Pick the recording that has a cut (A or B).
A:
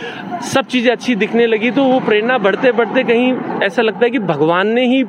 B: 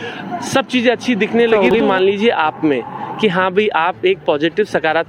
B